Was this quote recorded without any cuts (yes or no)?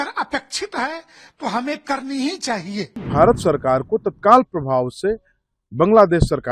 no